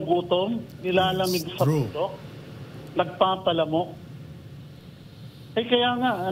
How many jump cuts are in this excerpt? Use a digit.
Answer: 0